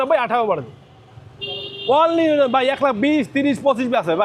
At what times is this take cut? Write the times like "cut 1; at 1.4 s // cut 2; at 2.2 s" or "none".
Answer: none